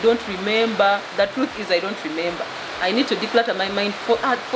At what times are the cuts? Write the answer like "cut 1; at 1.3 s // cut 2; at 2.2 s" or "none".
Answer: none